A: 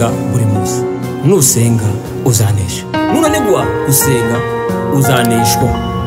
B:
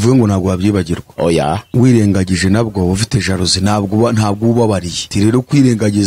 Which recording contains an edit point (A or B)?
B